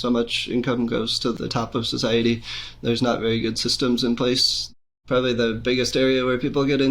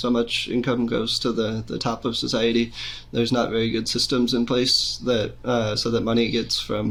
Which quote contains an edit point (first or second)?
first